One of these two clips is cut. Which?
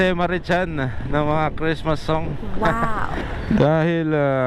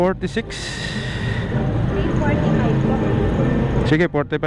first; 1 cut; at 2.9 s

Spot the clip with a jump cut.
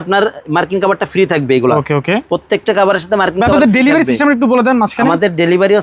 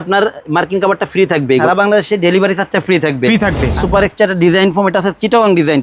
second; 2 cuts; at 1.6 s, 3.8 s

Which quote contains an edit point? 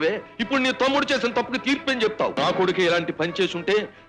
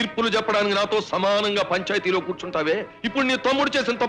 first; 1 cut; at 2.4 s

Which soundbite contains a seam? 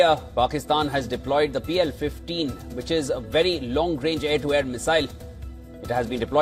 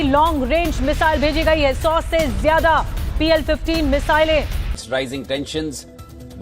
second; 1 cut; at 4.6 s

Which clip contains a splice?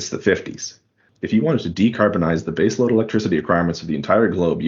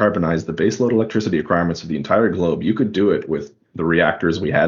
first; 1 cut; at 1.0 s

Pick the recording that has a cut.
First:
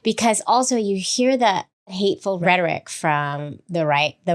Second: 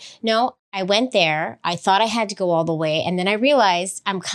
first; 1 cut; at 2.2 s

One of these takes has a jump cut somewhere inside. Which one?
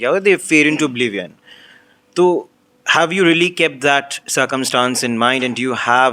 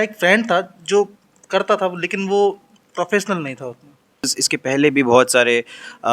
second; 1 cut; at 4.4 s

